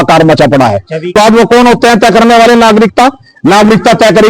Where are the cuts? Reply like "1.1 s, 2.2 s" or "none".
1.1 s